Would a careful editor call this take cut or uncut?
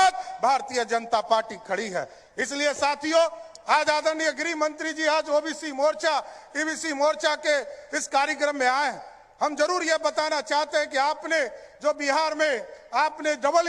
uncut